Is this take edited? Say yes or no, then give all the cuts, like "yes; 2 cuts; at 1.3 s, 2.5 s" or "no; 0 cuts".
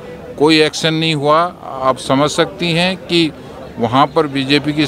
no; 0 cuts